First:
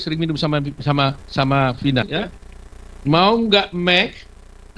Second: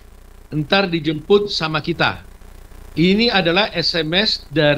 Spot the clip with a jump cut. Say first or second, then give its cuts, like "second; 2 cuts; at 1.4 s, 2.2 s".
first; 1 cut; at 2.1 s